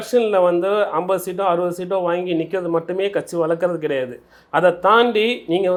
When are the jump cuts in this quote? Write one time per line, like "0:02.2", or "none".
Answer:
none